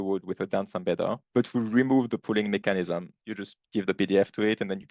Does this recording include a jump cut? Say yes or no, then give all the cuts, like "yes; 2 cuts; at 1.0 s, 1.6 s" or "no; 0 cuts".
yes; 1 cut; at 3.2 s